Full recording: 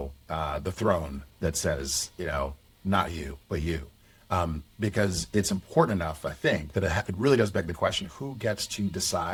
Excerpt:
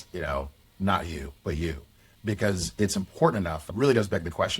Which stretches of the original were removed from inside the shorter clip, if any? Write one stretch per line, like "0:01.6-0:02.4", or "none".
0:04.2-0:04.7
0:06.2-0:07.1